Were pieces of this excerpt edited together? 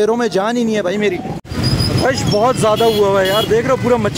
yes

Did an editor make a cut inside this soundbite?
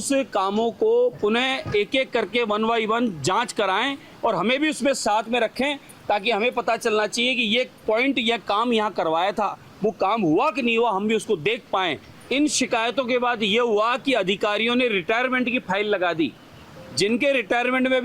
yes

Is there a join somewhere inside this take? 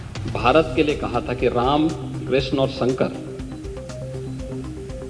no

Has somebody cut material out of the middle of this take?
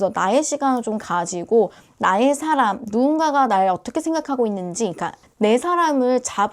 yes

